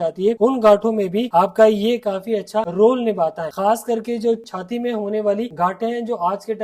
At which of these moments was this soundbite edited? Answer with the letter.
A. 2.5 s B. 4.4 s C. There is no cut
B